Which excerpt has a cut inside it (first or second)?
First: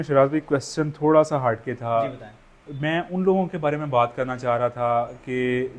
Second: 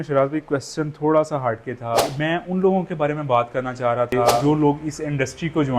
second